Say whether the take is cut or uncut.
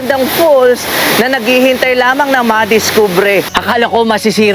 cut